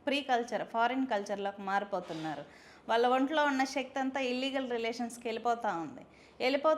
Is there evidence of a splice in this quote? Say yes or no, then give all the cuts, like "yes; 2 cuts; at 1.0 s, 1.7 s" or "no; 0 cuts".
no; 0 cuts